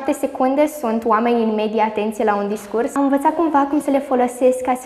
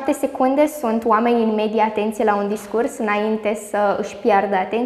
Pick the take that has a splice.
first; 1 cut; at 2.9 s

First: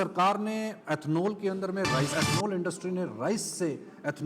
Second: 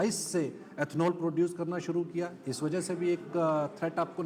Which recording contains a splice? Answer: first; 1 cut; at 2.1 s

